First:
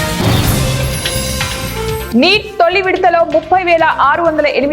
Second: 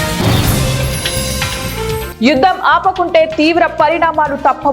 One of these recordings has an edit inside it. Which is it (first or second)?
second